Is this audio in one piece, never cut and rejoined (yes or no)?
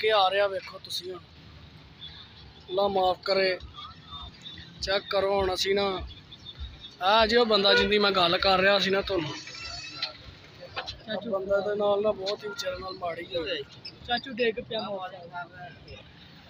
yes